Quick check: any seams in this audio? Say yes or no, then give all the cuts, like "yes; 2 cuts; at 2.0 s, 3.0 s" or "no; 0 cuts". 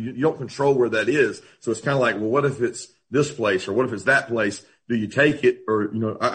no; 0 cuts